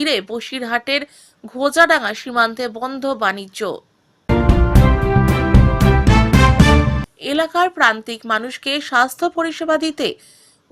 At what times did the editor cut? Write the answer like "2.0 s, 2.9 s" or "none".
4.1 s, 7.0 s